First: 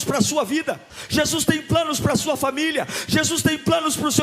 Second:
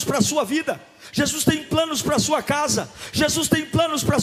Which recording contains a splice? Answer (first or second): first